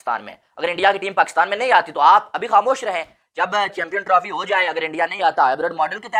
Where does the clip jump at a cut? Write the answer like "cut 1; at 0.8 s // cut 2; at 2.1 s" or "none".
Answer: none